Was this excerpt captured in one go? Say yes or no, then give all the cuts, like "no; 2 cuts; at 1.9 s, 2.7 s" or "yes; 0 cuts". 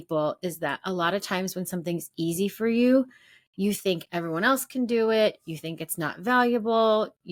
yes; 0 cuts